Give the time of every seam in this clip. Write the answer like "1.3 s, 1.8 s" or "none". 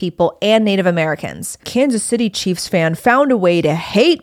1.6 s